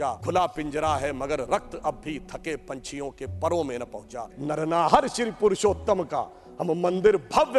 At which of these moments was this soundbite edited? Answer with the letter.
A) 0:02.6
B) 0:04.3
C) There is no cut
B